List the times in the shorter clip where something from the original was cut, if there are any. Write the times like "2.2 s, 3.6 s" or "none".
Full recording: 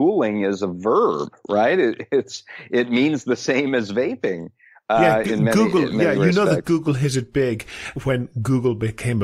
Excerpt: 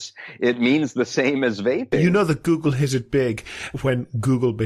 2.0 s

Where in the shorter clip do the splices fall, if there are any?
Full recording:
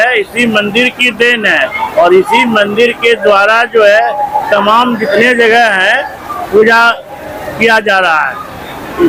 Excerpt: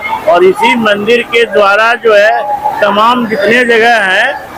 none

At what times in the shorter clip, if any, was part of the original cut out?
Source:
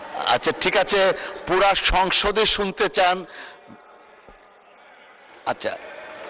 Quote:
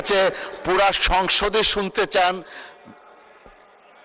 none

